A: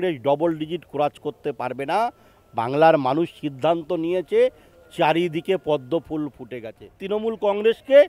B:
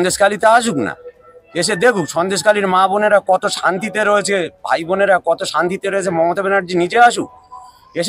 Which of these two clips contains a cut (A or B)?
A